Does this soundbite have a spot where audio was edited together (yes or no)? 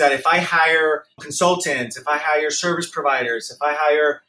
yes